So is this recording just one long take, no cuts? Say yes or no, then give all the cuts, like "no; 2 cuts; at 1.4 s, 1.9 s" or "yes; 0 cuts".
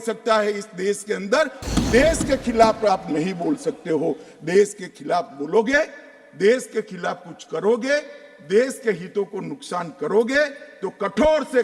no; 1 cut; at 1.6 s